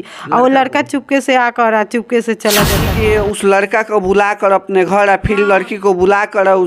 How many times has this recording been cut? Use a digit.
1